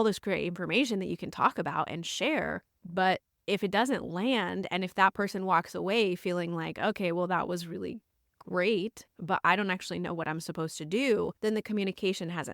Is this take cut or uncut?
cut